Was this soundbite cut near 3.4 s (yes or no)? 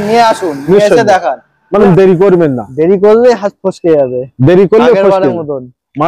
no